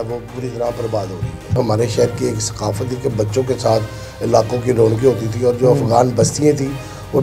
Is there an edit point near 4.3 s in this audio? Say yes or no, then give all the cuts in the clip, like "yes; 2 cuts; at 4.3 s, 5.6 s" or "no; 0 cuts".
no; 1 cut; at 1.6 s